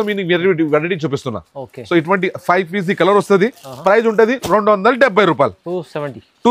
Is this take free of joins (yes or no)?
yes